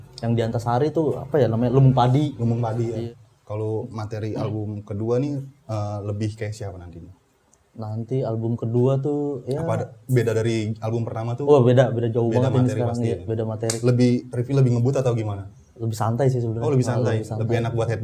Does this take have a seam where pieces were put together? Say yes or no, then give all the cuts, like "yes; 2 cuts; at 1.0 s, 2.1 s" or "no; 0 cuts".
yes; 1 cut; at 3.0 s